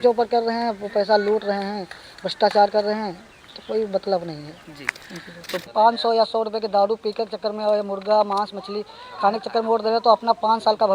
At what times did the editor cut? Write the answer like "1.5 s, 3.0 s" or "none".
5.7 s